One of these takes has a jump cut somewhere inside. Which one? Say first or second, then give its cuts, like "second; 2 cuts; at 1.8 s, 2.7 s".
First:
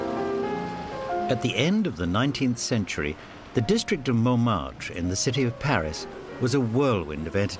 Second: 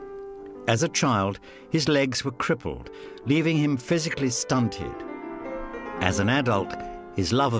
second; 1 cut; at 2.4 s